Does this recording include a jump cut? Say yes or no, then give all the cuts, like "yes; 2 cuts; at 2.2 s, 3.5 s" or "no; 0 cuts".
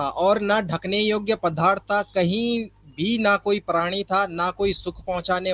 no; 0 cuts